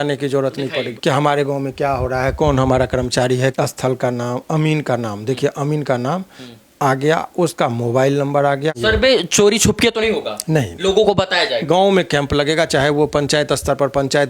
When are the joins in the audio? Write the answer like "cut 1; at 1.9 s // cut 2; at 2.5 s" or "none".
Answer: cut 1; at 0.9 s // cut 2; at 3.5 s // cut 3; at 8.8 s // cut 4; at 11.6 s